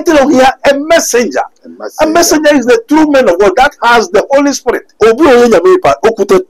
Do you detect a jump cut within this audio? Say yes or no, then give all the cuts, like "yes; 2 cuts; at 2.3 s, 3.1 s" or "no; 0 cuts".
yes; 1 cut; at 4.9 s